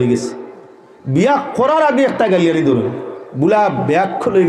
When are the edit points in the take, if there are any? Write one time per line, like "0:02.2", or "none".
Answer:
none